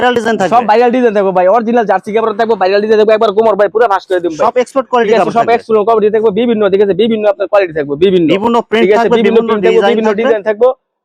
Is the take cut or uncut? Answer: uncut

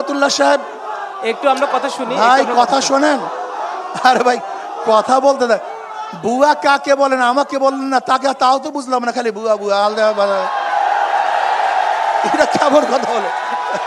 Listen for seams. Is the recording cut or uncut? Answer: uncut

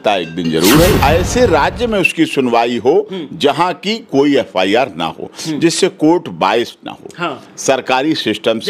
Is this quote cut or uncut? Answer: cut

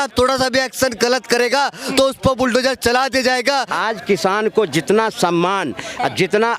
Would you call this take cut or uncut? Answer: cut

